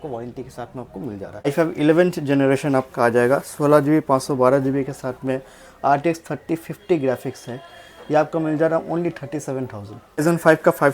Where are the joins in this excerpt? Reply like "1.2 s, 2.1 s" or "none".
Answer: 1.5 s, 10.2 s